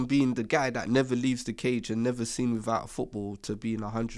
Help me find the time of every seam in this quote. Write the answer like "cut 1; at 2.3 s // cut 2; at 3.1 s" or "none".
none